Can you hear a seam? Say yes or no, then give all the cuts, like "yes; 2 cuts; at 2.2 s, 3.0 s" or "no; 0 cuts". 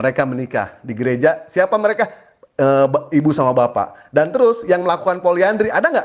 no; 0 cuts